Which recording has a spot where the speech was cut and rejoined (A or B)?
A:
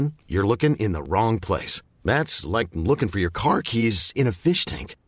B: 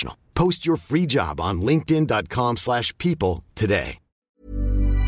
B